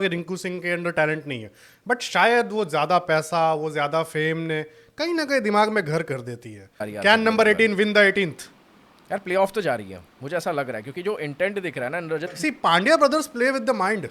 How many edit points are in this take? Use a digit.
2